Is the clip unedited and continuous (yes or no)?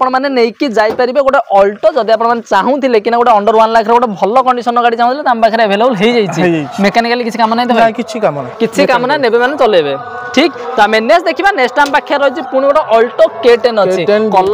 yes